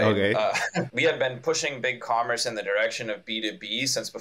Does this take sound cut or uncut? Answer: cut